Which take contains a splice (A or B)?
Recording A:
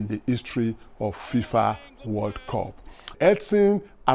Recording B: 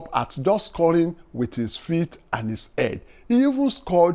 A